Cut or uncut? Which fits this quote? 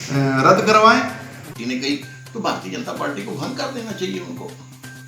cut